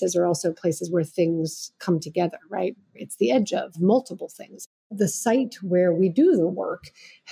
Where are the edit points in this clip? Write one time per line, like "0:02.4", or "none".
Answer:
0:04.9